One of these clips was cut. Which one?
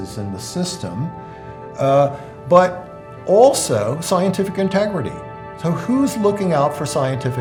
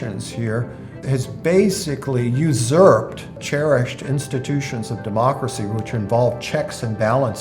second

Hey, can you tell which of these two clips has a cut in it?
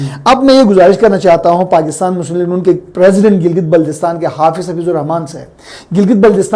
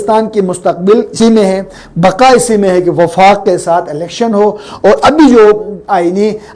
second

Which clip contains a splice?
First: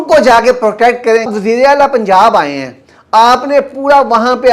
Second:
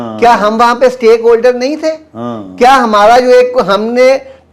first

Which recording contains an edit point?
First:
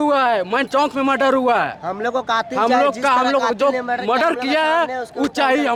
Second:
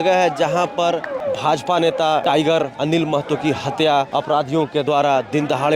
second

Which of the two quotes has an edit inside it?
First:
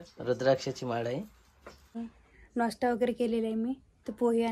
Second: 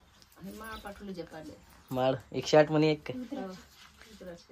first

